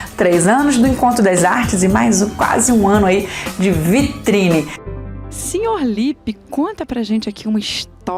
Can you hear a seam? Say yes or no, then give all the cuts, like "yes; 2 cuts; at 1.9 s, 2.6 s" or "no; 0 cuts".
yes; 1 cut; at 4.8 s